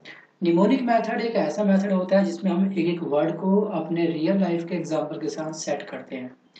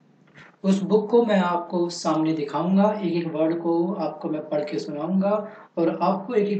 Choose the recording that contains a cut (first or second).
first